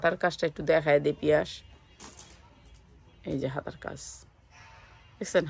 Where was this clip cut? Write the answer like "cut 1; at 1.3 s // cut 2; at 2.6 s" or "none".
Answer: none